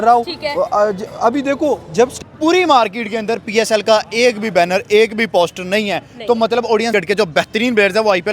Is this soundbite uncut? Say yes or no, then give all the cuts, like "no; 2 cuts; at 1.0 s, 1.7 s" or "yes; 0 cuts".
no; 2 cuts; at 2.1 s, 6.9 s